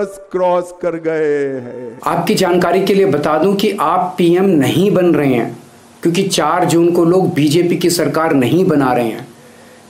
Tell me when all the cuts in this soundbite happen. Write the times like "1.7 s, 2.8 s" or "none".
1.8 s